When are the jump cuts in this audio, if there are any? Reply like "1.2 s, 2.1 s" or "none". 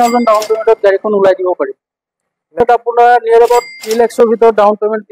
2.6 s